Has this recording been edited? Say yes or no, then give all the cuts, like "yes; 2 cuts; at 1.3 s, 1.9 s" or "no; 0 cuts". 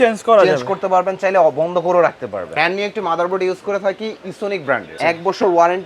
yes; 2 cuts; at 2.5 s, 5.0 s